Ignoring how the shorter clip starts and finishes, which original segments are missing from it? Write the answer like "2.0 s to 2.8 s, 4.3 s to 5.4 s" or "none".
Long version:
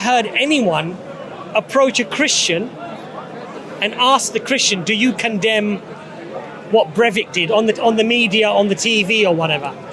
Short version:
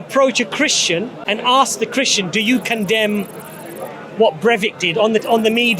2.8 s to 3.7 s

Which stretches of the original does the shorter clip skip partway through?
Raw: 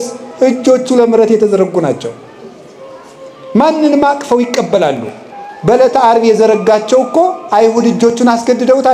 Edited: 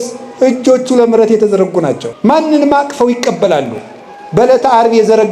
2.1 s to 3.4 s

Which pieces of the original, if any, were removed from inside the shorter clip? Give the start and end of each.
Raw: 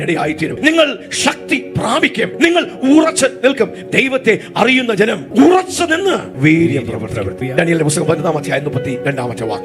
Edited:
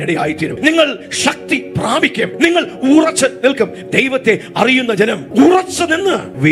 none

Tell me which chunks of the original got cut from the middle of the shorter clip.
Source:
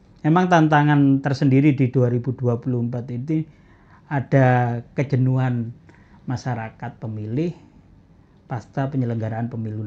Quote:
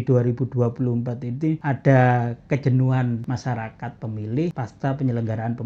3.5 s to 4.1 s, 5.7 s to 6.2 s, 7.5 s to 8.5 s

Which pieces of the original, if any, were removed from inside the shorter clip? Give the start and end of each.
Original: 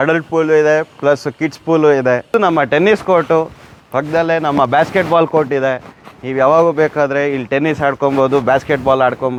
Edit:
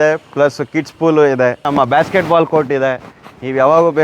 2.3 s to 4.4 s

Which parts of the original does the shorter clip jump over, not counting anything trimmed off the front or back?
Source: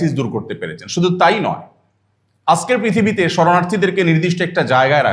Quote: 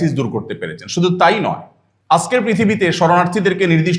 2.3 s to 2.6 s

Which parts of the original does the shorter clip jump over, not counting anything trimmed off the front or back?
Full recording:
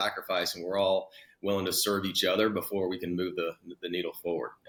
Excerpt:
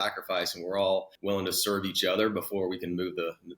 1.1 s to 1.3 s

